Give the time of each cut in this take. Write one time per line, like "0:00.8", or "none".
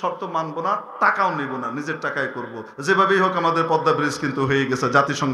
none

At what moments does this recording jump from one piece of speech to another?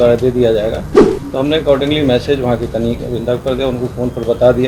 none

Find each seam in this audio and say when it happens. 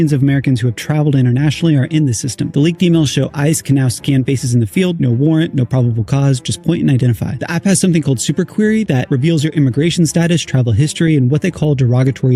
none

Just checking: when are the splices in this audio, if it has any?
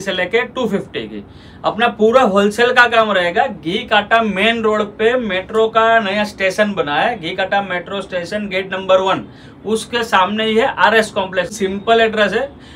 0:11.5

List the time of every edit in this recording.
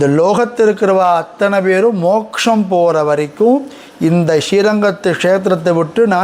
none

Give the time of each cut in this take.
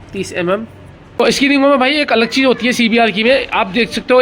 0:01.4

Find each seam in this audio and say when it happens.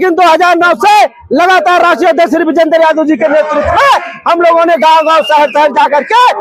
none

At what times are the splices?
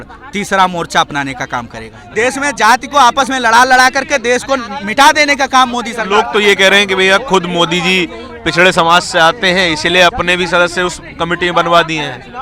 0:02.0

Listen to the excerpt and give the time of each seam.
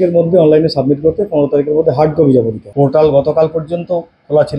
0:02.6

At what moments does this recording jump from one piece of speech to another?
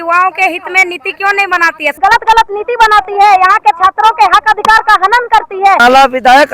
0:01.9
0:05.8

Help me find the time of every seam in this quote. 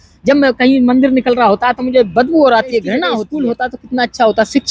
0:03.2

